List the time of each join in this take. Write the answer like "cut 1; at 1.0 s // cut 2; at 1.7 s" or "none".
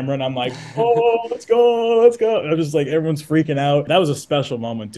cut 1; at 3.9 s

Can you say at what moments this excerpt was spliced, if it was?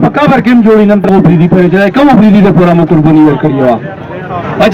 cut 1; at 1.1 s

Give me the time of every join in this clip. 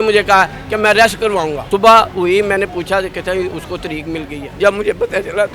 cut 1; at 1.6 s // cut 2; at 4.4 s

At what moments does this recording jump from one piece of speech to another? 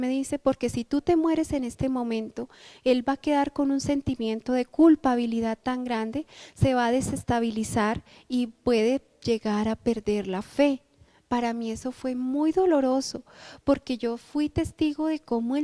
none

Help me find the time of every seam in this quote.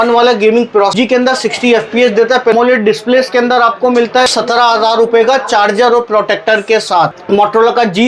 cut 1; at 0.9 s // cut 2; at 2.5 s // cut 3; at 4.3 s // cut 4; at 7.2 s

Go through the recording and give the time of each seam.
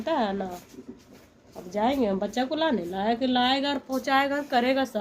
none

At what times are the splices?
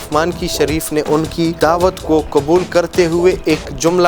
cut 1; at 1.5 s

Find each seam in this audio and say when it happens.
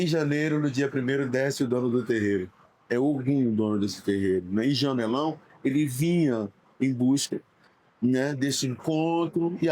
none

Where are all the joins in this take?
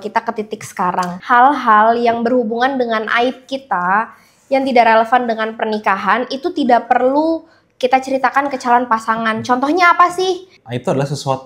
cut 1; at 1.2 s // cut 2; at 10.5 s

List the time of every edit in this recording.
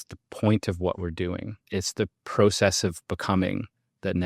cut 1; at 1.6 s

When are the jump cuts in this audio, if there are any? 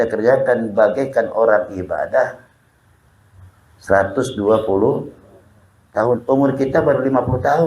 none

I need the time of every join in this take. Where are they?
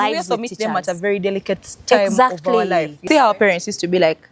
cut 1; at 3.0 s

